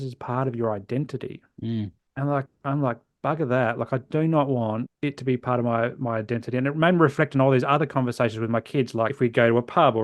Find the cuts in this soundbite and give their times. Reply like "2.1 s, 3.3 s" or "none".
2.0 s, 4.9 s, 9.1 s